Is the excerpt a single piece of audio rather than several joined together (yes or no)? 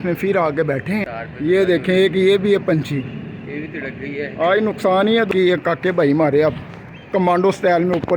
no